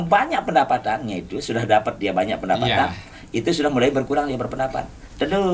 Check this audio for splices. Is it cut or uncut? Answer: uncut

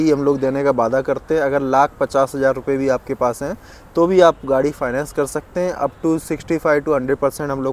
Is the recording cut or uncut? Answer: uncut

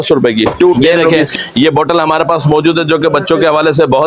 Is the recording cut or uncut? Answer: cut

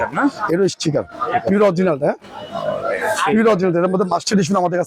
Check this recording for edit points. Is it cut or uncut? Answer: uncut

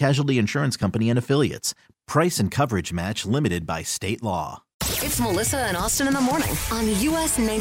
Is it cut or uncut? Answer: cut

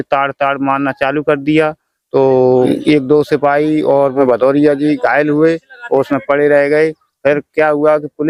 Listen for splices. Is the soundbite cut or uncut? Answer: uncut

